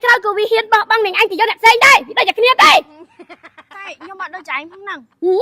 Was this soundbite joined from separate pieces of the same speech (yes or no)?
no